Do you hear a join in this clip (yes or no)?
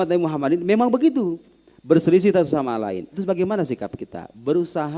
no